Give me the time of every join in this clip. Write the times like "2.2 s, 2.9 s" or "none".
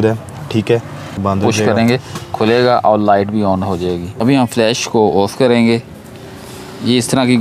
1.2 s, 4.2 s